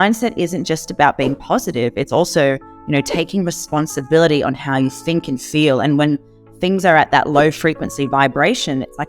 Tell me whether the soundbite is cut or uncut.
uncut